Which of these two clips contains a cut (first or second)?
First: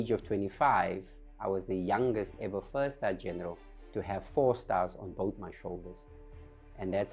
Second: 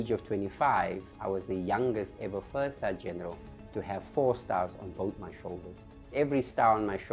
second